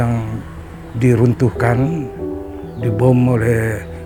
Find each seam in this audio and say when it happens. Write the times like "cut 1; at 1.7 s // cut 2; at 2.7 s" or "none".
none